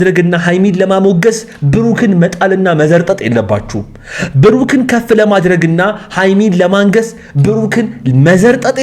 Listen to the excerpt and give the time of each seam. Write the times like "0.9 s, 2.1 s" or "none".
none